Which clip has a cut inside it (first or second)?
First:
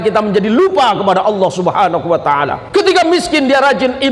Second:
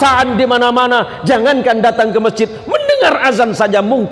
first